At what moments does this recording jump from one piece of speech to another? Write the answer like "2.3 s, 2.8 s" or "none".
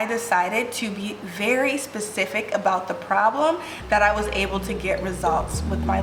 none